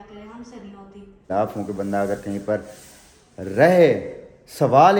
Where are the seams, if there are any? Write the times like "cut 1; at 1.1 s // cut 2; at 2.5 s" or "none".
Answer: cut 1; at 1.3 s